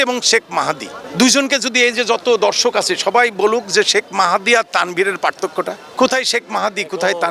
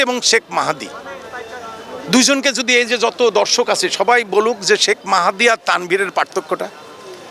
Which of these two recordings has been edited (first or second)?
first